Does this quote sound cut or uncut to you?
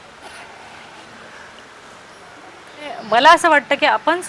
cut